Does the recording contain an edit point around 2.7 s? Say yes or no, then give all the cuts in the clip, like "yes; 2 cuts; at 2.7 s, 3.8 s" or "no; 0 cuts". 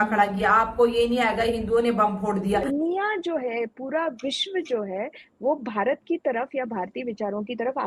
yes; 1 cut; at 2.7 s